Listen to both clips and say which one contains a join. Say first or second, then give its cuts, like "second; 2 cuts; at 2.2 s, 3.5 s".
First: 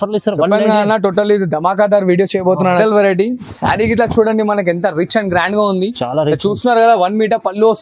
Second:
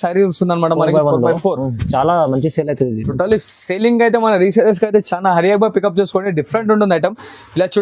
first; 1 cut; at 2.7 s